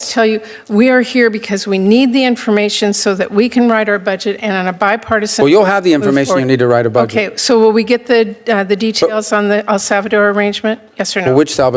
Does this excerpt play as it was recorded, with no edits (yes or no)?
yes